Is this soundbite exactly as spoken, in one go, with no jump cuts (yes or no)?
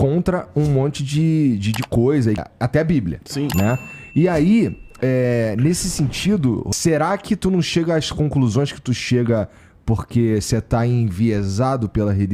yes